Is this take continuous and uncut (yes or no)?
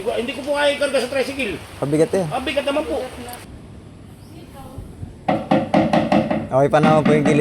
no